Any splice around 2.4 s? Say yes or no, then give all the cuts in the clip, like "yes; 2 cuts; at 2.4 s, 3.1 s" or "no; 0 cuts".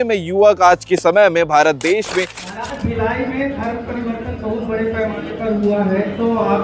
yes; 1 cut; at 2.4 s